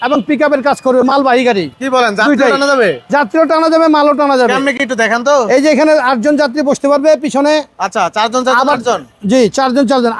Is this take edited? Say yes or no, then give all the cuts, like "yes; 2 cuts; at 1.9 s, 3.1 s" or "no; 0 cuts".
no; 0 cuts